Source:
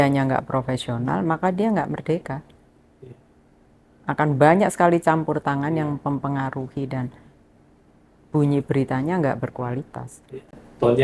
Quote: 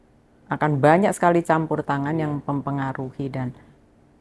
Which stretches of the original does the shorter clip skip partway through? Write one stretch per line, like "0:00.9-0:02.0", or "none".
none